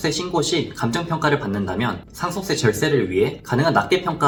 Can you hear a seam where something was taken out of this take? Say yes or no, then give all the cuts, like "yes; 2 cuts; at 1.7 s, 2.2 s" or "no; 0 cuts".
no; 0 cuts